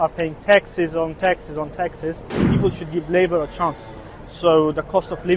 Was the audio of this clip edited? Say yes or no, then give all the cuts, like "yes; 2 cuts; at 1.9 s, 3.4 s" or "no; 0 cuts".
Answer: yes; 1 cut; at 2.5 s